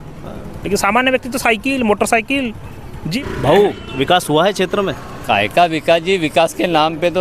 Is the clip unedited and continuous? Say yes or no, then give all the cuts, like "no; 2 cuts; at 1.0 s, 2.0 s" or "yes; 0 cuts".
no; 1 cut; at 3.2 s